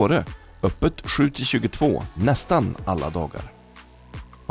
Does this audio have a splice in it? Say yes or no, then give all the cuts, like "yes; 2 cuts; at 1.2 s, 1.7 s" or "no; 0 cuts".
no; 0 cuts